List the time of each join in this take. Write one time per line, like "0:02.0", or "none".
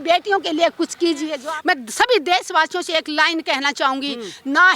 0:01.3